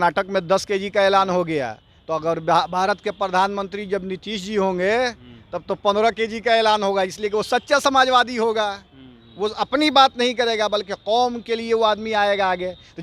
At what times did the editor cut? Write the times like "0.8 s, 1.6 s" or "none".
none